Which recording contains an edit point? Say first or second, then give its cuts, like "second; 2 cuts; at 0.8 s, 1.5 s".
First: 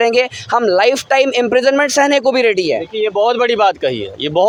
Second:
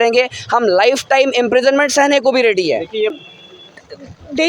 second; 1 cut; at 3.1 s